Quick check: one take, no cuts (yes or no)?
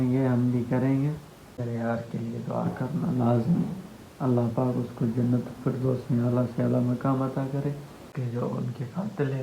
no